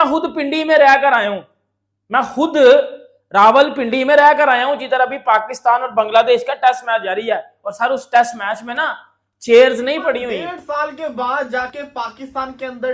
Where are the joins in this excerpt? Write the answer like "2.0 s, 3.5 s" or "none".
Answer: 10.6 s